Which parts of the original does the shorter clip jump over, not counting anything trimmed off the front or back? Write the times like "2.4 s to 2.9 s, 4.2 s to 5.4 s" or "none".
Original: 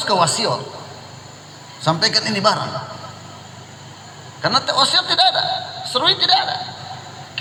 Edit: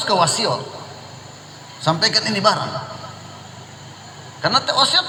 none

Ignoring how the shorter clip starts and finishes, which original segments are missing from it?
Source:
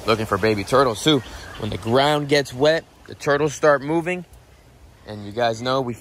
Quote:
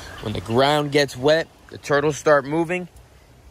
none

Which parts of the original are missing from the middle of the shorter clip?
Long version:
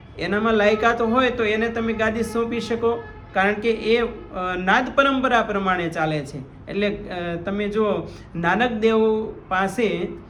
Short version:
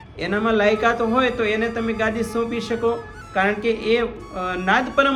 none

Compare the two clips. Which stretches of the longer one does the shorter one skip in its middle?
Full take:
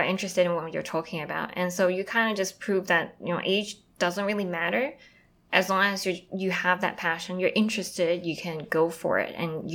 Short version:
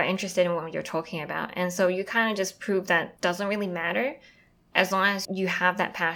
3.1 s to 3.9 s, 6.0 s to 6.2 s

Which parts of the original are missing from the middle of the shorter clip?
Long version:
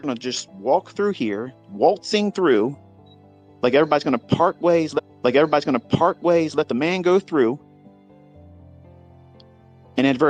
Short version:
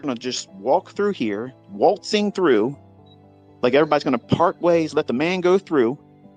4.9 s to 6.5 s

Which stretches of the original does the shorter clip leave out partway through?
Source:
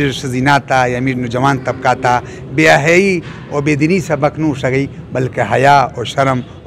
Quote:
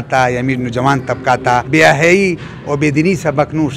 2.2 s to 2.5 s

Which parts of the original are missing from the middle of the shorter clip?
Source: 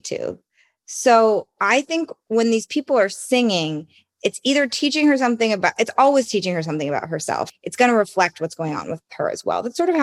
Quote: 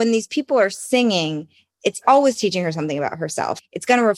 4.4 s to 5.9 s

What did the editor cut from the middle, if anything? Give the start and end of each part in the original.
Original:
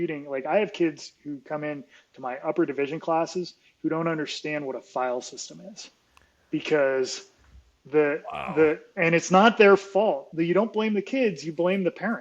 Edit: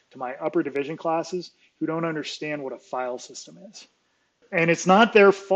6.4 s to 8.9 s

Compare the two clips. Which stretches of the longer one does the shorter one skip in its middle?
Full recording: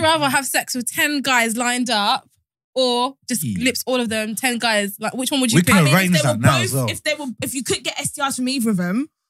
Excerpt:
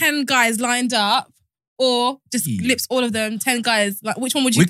none

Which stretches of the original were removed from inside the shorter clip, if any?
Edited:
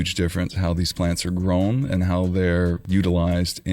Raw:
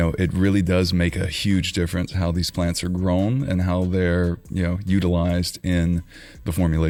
4.4 s to 4.8 s

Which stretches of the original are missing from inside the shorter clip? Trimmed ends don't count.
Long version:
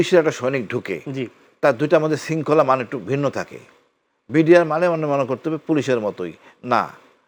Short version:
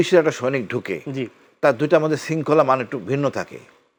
none

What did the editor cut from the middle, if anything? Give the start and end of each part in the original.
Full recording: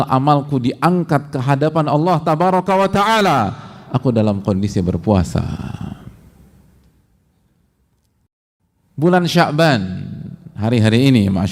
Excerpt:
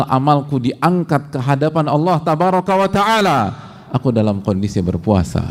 none

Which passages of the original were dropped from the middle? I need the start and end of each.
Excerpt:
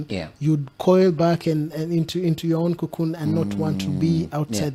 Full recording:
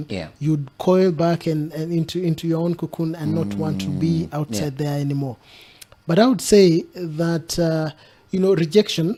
none

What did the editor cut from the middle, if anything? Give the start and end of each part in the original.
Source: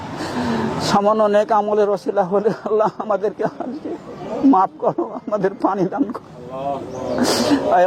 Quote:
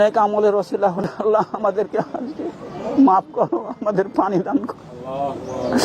2.3 s to 2.5 s

